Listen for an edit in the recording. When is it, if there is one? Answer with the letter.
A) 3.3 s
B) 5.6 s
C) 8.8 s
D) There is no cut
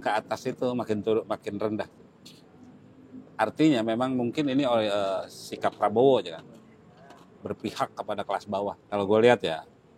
C